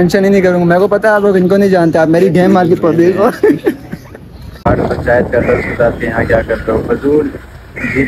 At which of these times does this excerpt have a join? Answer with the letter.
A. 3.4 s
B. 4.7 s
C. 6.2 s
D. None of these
B